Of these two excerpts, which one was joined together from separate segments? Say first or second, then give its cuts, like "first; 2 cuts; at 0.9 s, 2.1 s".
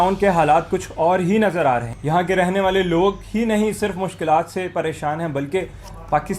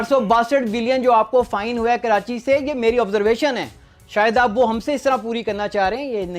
first; 1 cut; at 1.9 s